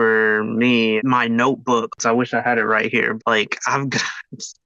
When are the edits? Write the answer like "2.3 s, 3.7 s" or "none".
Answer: 2.0 s, 3.2 s